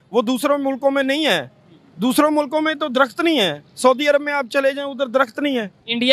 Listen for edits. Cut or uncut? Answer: uncut